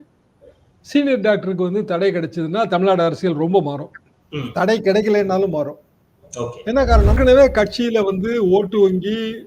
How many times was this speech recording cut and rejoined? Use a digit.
1